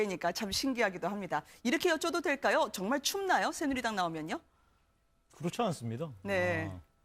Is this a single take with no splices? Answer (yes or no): yes